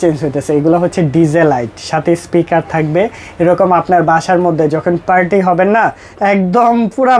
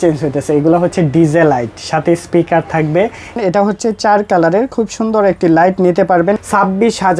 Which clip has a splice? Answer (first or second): second